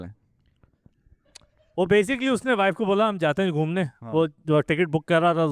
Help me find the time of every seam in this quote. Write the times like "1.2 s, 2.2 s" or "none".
none